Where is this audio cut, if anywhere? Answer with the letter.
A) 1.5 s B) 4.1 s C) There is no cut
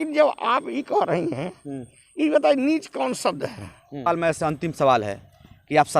B